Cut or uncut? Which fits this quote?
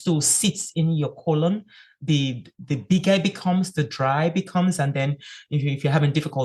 uncut